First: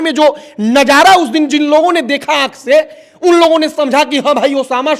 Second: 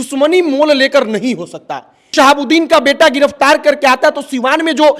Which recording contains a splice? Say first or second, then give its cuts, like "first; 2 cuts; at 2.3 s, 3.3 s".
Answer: second; 1 cut; at 2.1 s